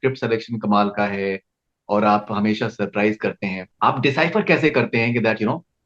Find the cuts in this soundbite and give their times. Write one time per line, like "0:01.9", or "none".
none